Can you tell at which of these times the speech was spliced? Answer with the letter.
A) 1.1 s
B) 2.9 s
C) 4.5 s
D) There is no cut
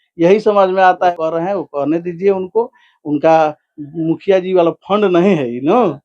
A